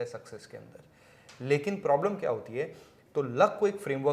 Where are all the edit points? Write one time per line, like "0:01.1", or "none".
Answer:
0:02.9